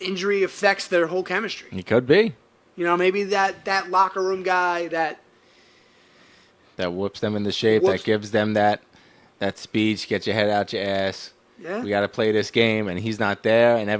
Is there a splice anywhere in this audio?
no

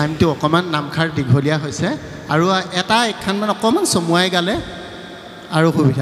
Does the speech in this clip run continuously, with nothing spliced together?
yes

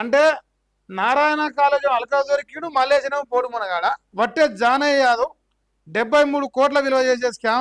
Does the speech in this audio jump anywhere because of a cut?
yes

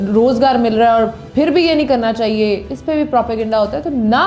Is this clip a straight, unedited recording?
yes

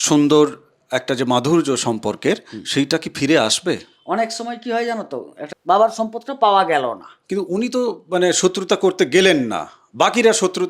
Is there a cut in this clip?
yes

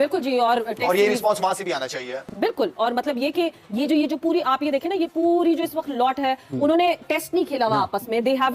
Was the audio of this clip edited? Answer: no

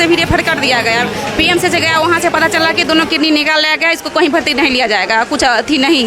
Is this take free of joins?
yes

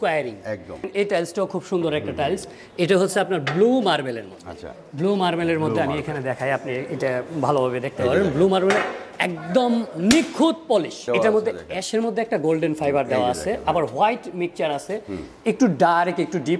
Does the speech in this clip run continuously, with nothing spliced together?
no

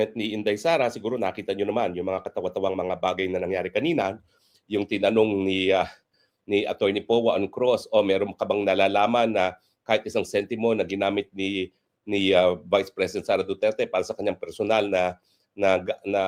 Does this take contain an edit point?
no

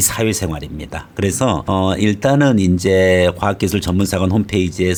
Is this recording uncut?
yes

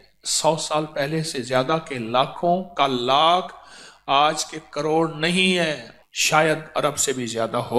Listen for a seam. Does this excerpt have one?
yes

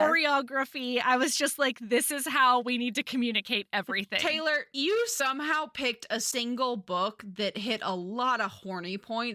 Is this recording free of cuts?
yes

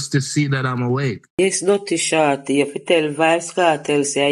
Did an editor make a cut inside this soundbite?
yes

